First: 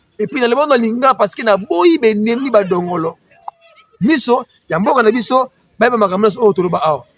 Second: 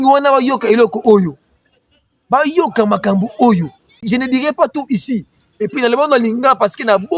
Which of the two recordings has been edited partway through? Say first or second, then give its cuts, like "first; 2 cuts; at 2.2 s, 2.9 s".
second; 1 cut; at 4.1 s